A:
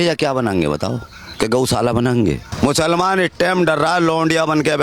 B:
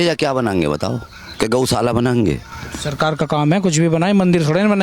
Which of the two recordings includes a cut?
A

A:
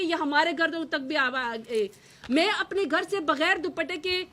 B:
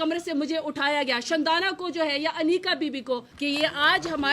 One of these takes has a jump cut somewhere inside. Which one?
B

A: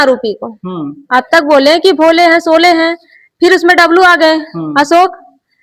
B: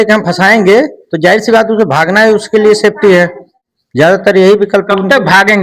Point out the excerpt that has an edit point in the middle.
B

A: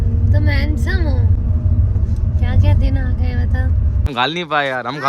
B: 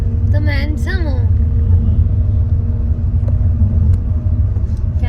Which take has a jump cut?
A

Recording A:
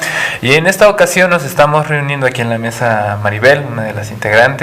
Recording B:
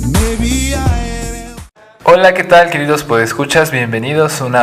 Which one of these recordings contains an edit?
A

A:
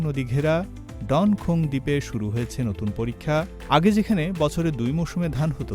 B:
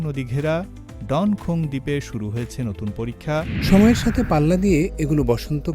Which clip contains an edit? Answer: B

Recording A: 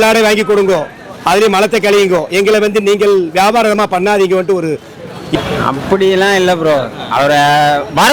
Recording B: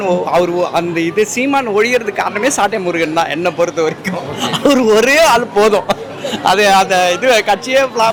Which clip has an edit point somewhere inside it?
A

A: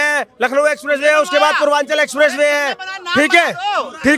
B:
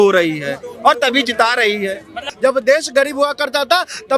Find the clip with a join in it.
B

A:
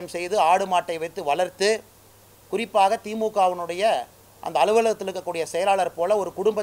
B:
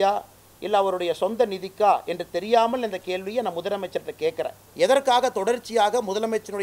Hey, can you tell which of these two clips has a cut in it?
B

